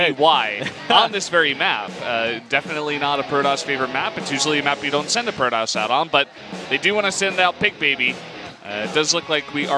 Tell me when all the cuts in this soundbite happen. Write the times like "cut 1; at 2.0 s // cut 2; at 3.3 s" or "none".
cut 1; at 5.9 s